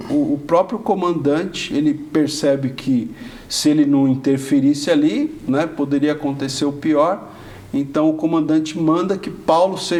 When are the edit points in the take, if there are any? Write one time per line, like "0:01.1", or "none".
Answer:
none

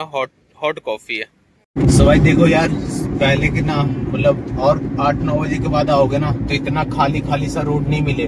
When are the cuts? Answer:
0:01.6

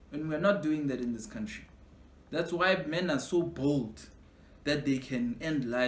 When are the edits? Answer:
none

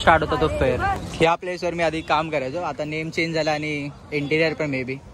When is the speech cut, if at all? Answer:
0:00.9

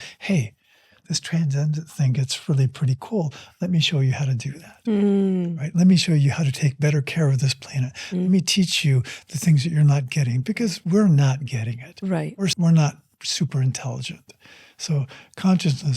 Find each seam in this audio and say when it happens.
0:12.5

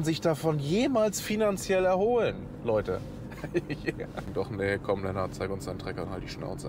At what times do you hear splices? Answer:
0:04.3

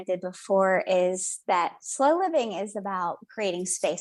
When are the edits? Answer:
none

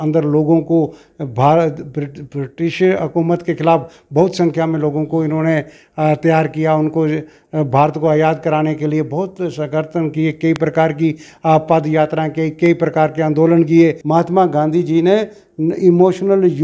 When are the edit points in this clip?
0:14.0

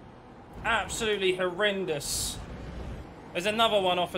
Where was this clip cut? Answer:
0:03.1

